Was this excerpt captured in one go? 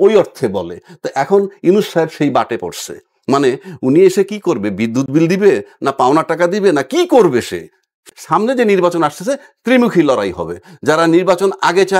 no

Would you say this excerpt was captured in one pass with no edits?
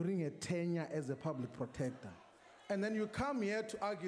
yes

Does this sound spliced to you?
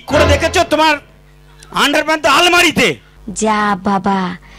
yes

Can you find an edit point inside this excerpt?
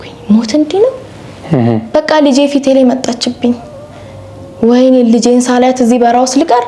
no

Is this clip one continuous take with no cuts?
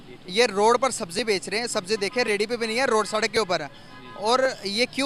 yes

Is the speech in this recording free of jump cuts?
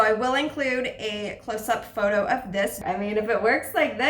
no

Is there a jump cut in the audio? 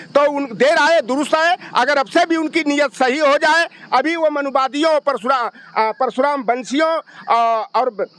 no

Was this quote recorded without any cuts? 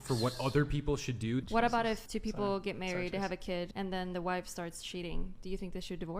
no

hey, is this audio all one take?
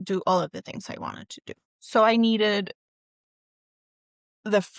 yes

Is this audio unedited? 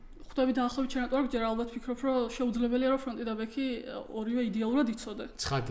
yes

